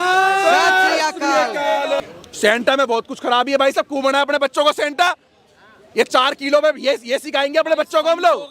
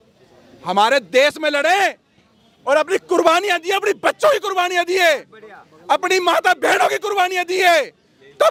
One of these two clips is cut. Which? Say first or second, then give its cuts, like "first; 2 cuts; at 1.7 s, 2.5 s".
first; 1 cut; at 2.0 s